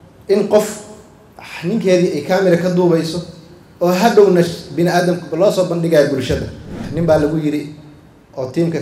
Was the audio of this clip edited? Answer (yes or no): yes